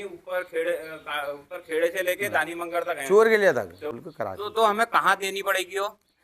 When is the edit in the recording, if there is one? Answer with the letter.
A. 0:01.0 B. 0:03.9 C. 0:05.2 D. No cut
B